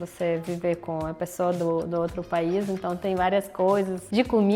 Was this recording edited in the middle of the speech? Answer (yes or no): no